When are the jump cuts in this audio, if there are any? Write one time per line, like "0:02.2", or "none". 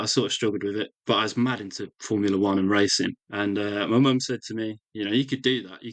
0:01.0
0:03.2